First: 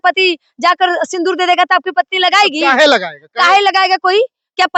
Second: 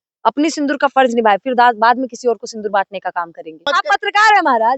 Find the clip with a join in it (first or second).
second